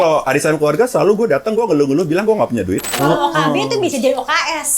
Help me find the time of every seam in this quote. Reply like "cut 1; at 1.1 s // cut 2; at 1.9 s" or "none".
cut 1; at 2.9 s